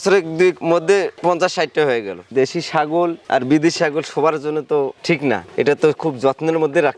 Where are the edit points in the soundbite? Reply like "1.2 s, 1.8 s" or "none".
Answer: 2.2 s